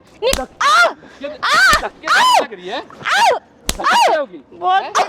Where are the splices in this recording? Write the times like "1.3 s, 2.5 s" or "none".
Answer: none